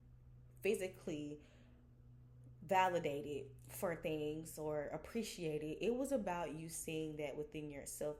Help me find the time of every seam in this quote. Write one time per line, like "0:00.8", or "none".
none

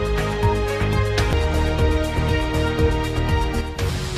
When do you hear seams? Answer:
0:01.3
0:03.4

